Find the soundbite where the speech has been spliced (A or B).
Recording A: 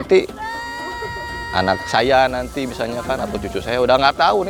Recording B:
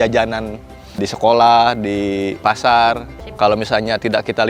B